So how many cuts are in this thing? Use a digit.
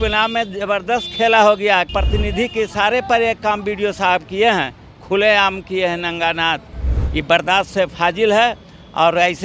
1